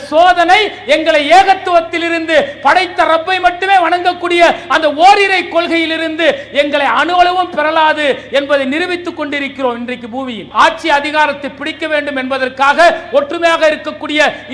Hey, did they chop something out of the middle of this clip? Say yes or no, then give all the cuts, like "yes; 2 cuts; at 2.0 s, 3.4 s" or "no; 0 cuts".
yes; 1 cut; at 10.4 s